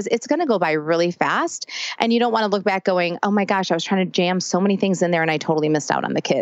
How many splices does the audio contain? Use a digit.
0